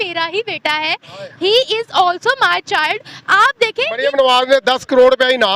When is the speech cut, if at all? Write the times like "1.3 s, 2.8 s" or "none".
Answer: 3.9 s